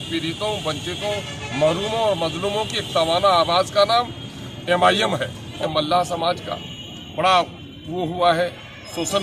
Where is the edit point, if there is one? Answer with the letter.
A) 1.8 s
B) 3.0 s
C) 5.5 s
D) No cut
C